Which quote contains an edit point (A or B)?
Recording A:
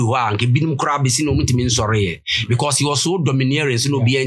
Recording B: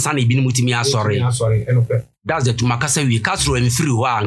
B